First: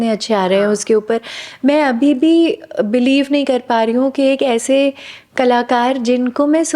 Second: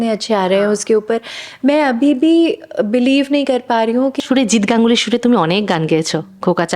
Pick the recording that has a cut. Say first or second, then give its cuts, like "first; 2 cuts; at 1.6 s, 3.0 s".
second; 1 cut; at 4.2 s